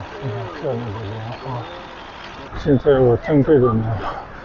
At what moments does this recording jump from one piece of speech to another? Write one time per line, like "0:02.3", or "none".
0:02.5